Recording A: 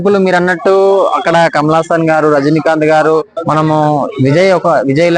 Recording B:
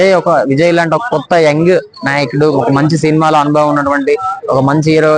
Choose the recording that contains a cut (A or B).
A